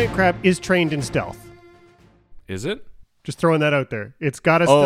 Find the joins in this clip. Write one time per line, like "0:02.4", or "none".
none